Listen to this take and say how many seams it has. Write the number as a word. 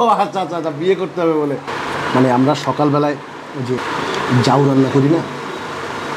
two